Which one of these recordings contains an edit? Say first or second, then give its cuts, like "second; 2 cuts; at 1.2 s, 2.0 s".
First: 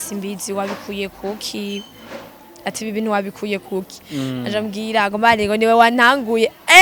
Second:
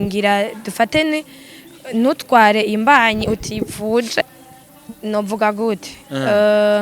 second; 1 cut; at 4.4 s